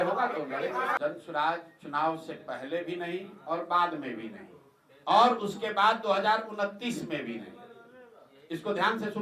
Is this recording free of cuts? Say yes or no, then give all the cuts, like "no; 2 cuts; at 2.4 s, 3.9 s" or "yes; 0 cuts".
no; 1 cut; at 1.0 s